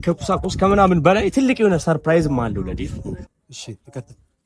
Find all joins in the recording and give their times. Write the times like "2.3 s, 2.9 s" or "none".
3.2 s